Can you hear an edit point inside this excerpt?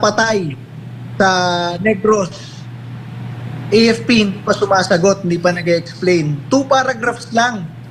no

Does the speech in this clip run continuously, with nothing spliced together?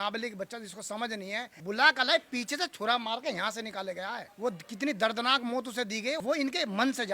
no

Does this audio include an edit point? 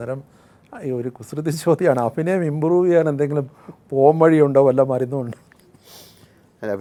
no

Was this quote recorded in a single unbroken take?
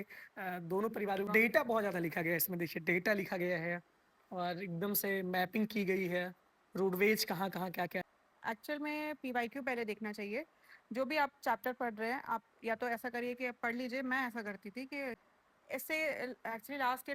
no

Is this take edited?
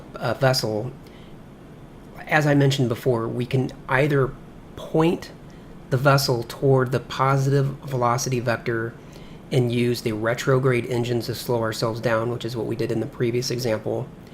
yes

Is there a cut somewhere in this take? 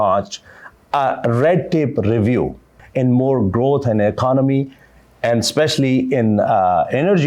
yes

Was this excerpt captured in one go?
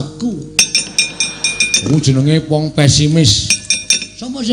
no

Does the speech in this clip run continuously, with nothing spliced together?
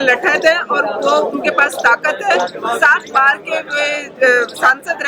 yes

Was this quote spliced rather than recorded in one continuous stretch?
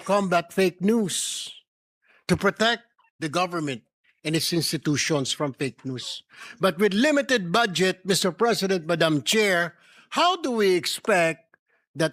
no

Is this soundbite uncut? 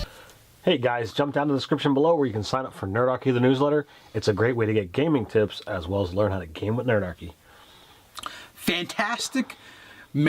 no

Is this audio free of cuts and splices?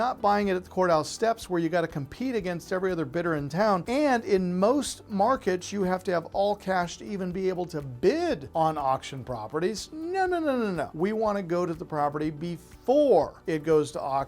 no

